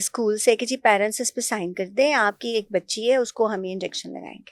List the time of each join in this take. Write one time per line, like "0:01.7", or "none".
none